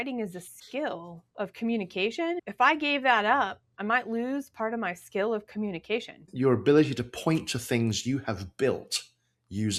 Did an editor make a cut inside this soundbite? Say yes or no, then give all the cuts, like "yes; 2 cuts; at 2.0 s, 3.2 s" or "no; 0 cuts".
yes; 2 cuts; at 2.4 s, 6.2 s